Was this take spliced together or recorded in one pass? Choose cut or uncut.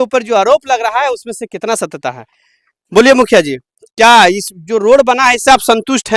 uncut